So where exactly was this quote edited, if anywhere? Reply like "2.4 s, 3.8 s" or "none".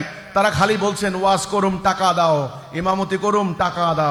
none